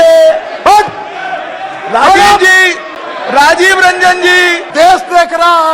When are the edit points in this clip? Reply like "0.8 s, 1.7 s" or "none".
4.7 s